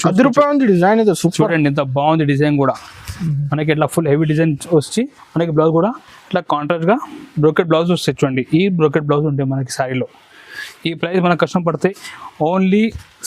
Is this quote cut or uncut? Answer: uncut